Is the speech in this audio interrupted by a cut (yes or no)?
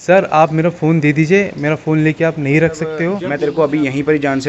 yes